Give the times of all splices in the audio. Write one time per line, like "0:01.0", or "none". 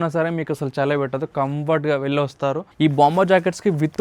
0:02.7